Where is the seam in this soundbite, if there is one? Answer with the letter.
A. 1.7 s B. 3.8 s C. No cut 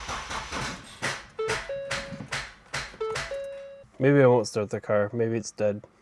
B